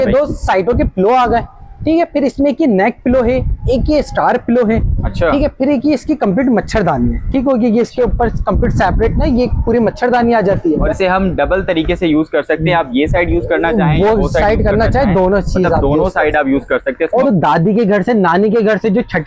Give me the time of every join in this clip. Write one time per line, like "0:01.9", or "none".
0:10.9
0:17.2